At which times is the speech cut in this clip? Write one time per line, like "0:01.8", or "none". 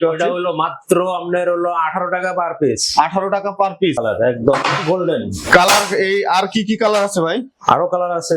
0:04.0

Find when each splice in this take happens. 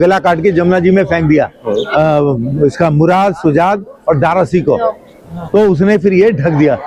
none

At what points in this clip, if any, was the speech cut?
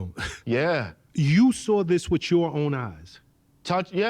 0:01.0

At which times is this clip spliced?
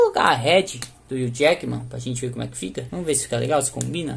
0:02.9

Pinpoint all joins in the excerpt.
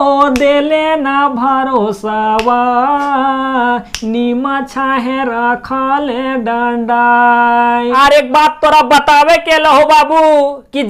0:07.8

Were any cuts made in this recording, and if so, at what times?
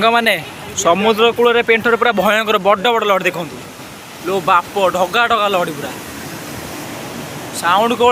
none

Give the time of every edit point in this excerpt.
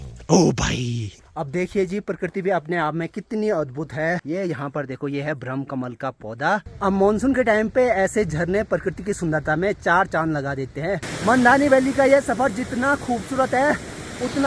0:01.2
0:04.2
0:06.7
0:11.1

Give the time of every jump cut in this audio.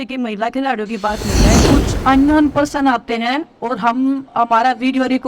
0:01.6

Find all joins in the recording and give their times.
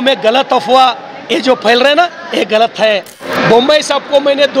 0:03.2

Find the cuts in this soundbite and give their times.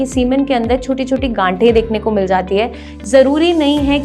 0:02.9

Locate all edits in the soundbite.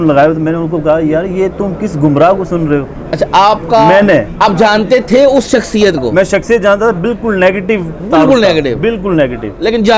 none

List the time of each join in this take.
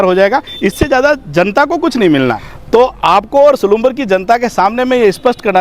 0:02.5

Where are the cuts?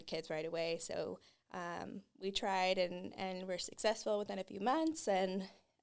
none

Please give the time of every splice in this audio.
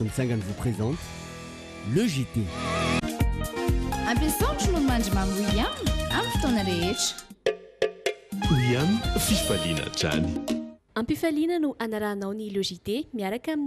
none

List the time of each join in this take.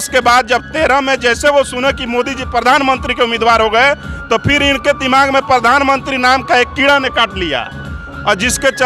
0:02.2

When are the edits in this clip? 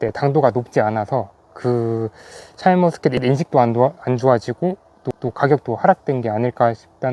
none

